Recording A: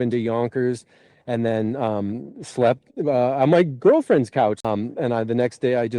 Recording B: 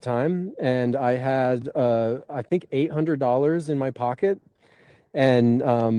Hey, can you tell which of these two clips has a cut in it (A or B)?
A